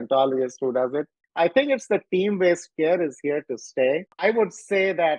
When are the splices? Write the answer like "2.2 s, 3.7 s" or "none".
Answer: 1.2 s, 4.2 s